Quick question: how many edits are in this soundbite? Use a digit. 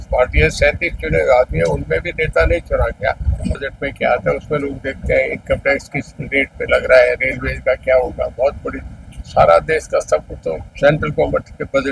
1